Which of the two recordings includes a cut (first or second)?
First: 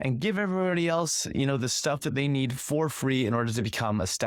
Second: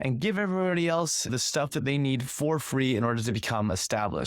second